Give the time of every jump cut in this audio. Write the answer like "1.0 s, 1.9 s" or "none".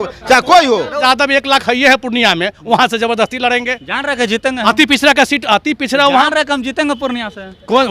1.0 s